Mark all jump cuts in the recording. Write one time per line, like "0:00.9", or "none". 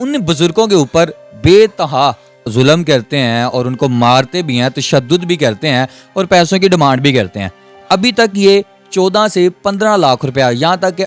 0:02.5